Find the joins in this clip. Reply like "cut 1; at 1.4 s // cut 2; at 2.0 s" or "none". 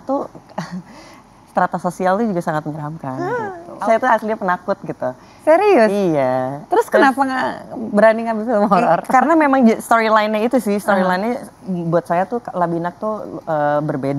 cut 1; at 3.3 s